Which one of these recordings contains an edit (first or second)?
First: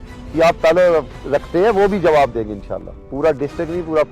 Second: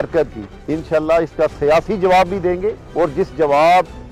first